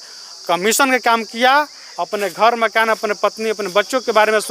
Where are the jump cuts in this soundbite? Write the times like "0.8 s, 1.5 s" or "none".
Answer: none